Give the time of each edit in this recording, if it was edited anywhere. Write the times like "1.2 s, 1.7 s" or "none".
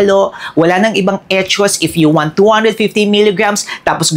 none